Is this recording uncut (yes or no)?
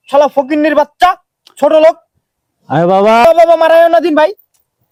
yes